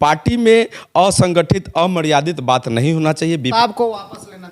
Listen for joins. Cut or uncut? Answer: cut